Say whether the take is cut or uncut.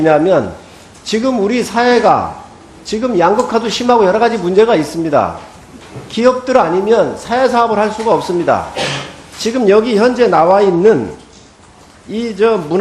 cut